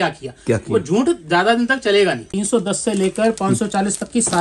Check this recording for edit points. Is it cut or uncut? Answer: cut